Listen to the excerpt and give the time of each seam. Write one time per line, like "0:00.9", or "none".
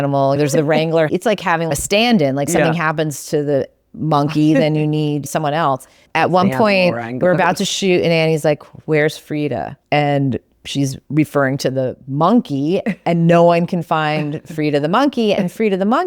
0:01.1
0:06.0
0:09.7
0:11.0